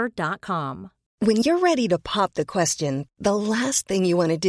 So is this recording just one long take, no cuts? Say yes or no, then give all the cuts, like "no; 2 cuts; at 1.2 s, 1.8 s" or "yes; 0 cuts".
no; 1 cut; at 1.1 s